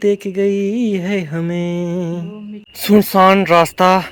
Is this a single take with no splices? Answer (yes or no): no